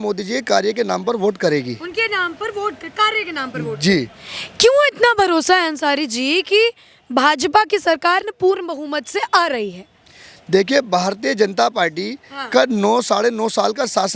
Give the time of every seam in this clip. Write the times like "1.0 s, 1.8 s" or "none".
none